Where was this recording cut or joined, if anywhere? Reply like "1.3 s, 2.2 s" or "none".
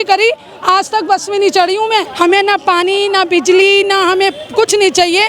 2.1 s